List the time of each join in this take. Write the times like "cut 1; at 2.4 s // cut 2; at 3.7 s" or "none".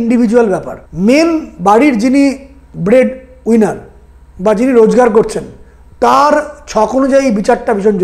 none